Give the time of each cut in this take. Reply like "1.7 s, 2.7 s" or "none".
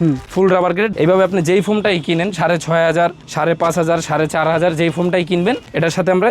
0.9 s